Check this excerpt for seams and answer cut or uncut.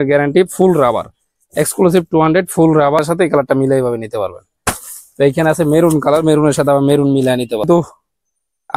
cut